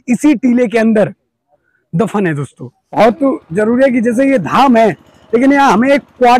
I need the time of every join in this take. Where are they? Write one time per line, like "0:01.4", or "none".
0:03.0